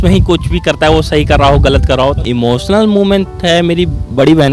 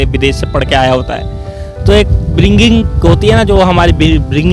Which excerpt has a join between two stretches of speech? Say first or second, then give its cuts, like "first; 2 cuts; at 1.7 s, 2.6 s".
first; 1 cut; at 2.2 s